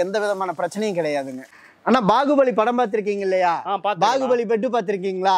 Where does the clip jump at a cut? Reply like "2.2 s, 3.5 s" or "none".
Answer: 1.4 s